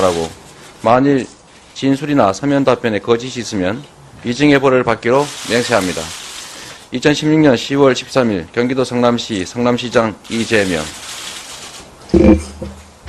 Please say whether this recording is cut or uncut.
cut